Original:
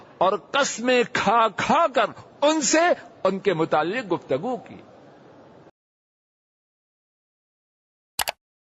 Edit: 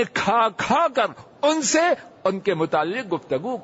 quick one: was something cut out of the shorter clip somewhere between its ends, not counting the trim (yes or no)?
no